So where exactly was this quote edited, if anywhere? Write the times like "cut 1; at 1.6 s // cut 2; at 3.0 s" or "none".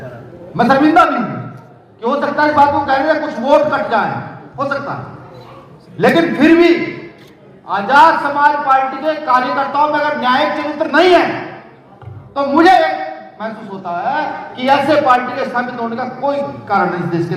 none